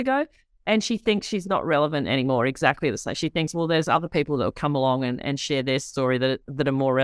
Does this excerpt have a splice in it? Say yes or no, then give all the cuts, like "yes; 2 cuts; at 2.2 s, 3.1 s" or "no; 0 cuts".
no; 0 cuts